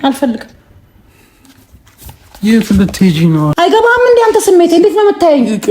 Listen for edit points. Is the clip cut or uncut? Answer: cut